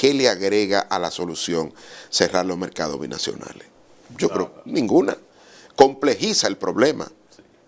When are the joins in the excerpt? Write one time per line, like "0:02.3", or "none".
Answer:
none